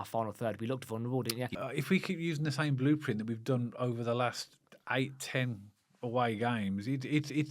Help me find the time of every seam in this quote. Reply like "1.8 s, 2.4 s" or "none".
1.6 s

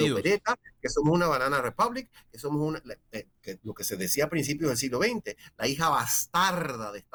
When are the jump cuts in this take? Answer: none

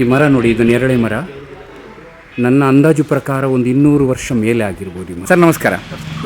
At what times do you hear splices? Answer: 5.3 s

